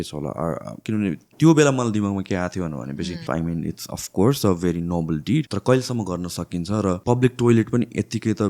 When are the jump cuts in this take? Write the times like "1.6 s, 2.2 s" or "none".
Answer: 0.8 s, 3.2 s, 5.5 s, 7.0 s

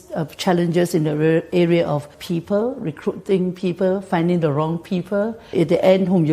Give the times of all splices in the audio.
2.2 s, 5.4 s

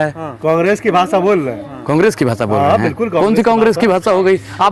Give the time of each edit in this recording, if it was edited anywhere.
none

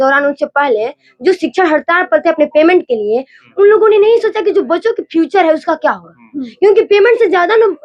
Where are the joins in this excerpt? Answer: none

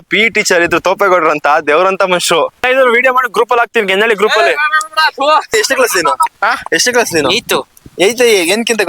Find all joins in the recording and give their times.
2.6 s, 5.5 s

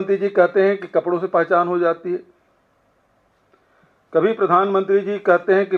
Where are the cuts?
none

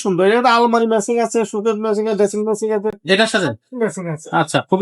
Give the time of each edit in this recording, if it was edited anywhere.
none

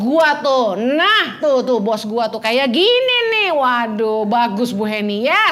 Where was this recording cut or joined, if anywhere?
none

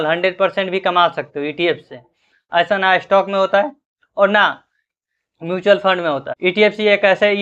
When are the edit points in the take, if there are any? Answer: none

